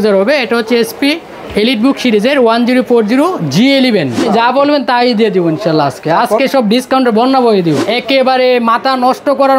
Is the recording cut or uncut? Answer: cut